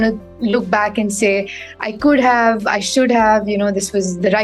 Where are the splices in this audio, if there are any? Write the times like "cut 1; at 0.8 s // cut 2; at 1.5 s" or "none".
none